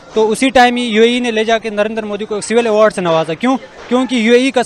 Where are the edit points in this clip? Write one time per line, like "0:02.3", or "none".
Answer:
none